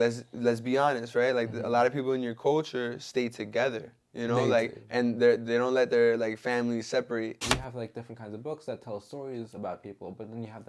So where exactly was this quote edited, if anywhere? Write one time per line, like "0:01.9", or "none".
0:07.5

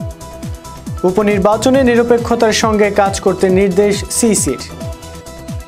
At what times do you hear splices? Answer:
0:01.0
0:04.7

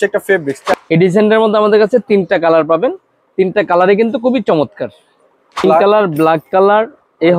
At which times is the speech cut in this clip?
0:00.7
0:05.6

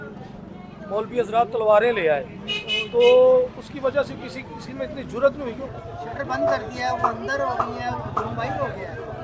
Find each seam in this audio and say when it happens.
0:05.6

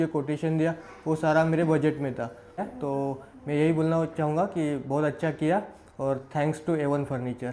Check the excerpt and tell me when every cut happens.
0:02.7

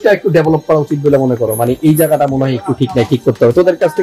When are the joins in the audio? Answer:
none

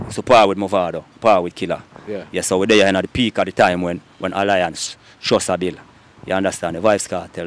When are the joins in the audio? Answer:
none

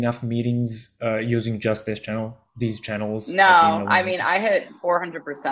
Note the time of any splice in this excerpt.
none

